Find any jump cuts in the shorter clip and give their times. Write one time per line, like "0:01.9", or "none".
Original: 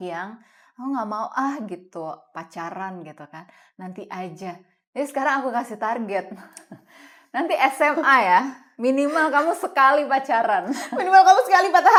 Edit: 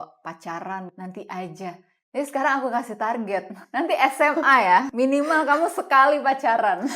0:00.9
0:03.6
0:04.9